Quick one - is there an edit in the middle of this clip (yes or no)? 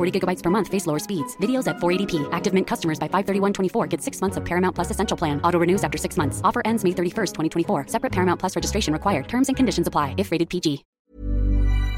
yes